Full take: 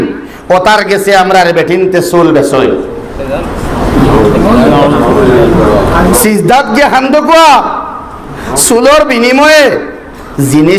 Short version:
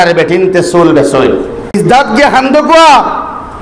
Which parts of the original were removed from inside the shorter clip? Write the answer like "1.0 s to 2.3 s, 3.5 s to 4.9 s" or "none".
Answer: 3.1 s to 6.3 s